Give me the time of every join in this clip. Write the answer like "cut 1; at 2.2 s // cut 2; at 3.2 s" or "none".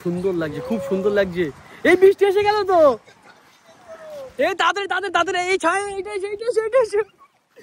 none